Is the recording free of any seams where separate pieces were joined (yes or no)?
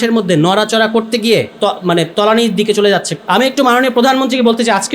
no